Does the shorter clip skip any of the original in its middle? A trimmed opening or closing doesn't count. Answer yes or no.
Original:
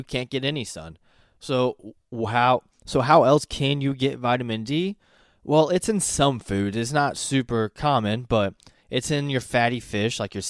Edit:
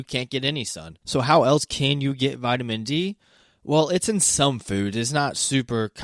yes